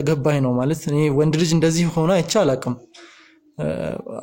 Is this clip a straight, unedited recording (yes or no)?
yes